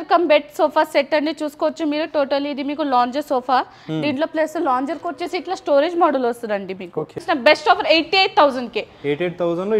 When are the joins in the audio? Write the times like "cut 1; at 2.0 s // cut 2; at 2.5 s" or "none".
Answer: cut 1; at 7.2 s